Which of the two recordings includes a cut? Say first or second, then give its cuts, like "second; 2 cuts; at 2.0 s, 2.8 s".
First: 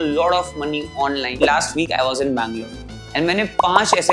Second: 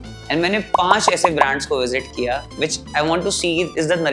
first; 1 cut; at 1.3 s